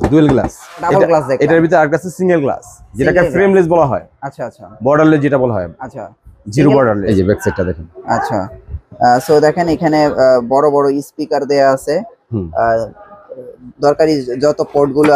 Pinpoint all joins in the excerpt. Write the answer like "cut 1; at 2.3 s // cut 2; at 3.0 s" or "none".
cut 1; at 0.9 s // cut 2; at 7.0 s